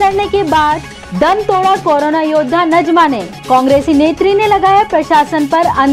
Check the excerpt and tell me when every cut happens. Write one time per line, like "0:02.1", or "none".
none

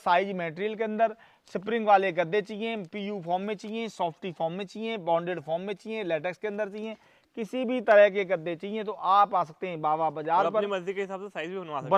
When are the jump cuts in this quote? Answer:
none

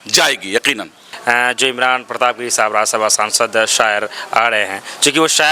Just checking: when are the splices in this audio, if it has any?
0:01.1

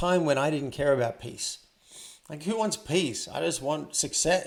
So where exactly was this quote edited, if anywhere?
none

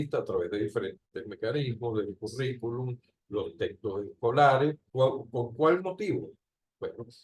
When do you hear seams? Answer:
0:04.8

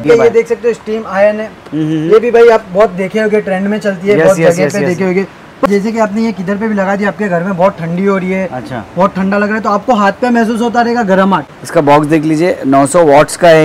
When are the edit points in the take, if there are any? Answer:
0:05.7
0:11.6

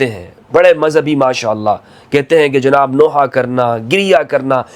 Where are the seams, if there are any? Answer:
none

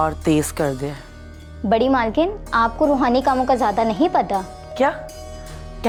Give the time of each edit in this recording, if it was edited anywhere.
none

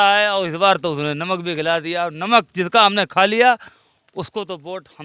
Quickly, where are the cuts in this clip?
none

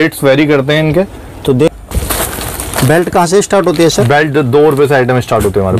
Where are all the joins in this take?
0:01.7

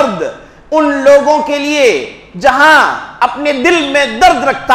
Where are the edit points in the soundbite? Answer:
none

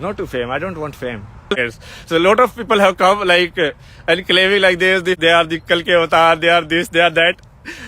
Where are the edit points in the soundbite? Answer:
0:01.5
0:05.2

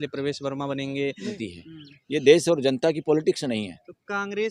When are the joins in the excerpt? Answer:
0:01.4

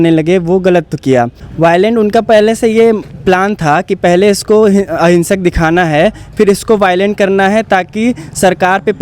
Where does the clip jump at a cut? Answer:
0:01.4

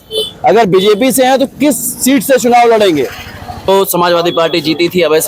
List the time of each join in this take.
0:03.7

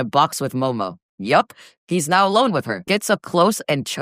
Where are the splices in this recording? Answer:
0:02.7

